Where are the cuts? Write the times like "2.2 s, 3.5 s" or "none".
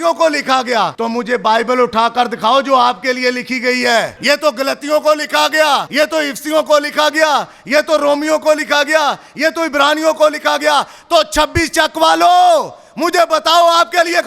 1.0 s, 4.1 s, 5.9 s